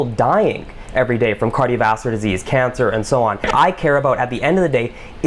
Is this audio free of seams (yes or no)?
yes